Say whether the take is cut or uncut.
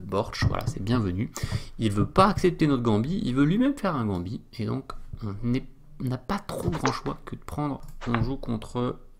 cut